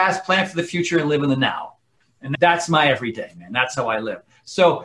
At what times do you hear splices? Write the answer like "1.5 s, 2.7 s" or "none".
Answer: 2.2 s